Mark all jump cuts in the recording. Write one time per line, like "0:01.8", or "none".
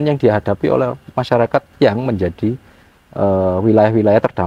none